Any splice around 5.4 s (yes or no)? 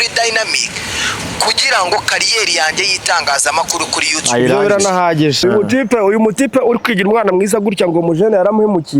yes